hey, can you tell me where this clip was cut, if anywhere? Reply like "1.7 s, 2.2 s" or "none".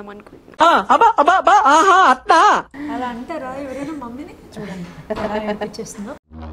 2.7 s